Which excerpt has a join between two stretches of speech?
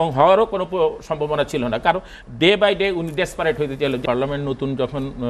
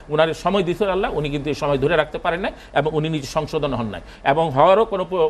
first; 1 cut; at 4.0 s

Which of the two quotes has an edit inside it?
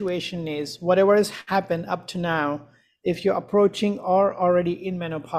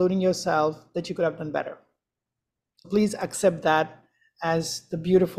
second; 1 cut; at 2.9 s

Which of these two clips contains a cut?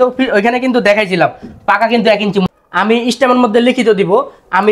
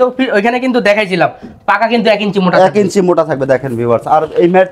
first; 1 cut; at 2.5 s

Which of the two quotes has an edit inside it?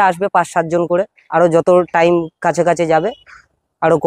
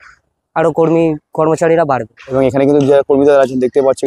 second; 1 cut; at 2.2 s

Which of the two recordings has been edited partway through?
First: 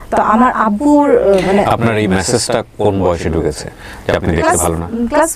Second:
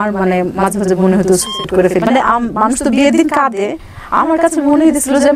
second; 1 cut; at 2.0 s

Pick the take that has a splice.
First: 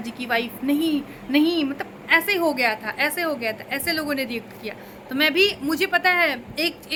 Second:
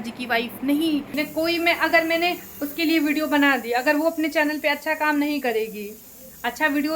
second; 1 cut; at 1.2 s

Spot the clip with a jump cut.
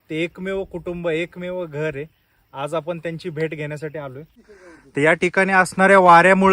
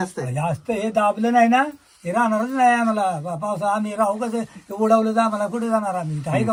first; 1 cut; at 4.4 s

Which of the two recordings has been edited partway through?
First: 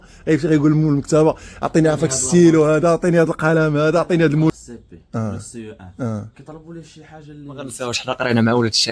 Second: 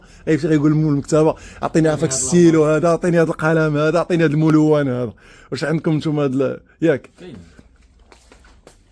first; 2 cuts; at 4.5 s, 7.8 s

